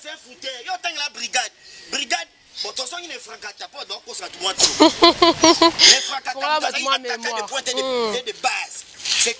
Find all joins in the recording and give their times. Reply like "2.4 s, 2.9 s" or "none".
none

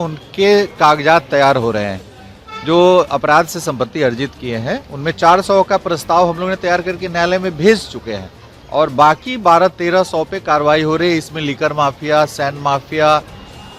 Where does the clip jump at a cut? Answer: none

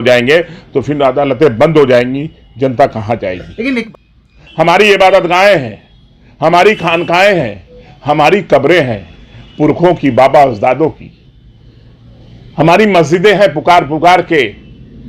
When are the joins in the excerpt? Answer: 3.8 s

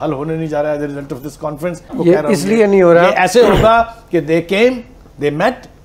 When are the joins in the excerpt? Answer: none

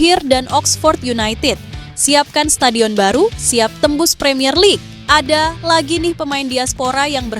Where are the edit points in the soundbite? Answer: 4.9 s

